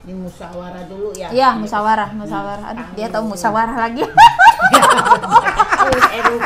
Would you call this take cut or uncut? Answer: uncut